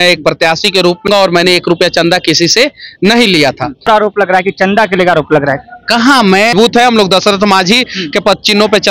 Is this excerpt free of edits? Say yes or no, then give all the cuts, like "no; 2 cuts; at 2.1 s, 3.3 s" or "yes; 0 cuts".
no; 3 cuts; at 1.1 s, 3.9 s, 6.5 s